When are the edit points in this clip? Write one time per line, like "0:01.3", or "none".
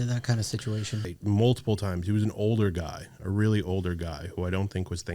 0:01.1